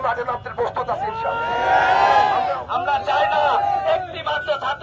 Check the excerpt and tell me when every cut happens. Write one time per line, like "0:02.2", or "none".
0:02.6